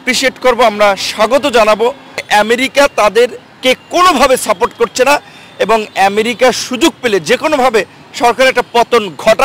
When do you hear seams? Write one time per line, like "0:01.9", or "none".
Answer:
0:02.3